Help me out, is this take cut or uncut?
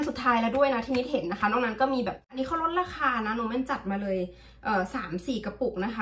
cut